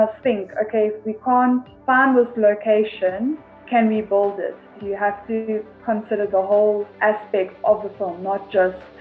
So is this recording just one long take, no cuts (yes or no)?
no